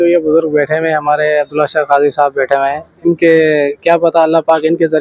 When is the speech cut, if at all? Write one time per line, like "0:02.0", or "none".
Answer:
none